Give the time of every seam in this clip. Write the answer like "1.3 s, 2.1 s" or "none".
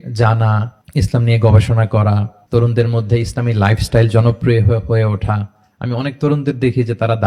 none